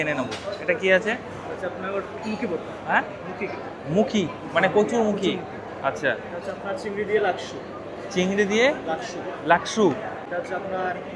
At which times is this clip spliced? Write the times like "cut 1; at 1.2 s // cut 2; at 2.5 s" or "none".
none